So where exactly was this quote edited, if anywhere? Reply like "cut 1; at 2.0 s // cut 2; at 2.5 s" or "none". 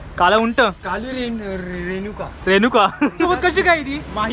cut 1; at 3.3 s